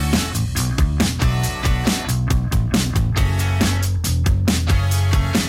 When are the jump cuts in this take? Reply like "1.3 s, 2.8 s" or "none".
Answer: 2.4 s